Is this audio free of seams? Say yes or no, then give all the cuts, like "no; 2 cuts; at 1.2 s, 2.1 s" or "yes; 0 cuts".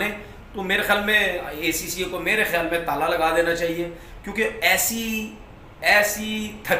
yes; 0 cuts